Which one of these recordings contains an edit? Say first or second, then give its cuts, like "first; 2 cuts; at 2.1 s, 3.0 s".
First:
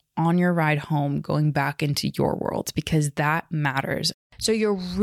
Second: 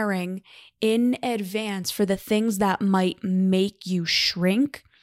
first; 1 cut; at 4.1 s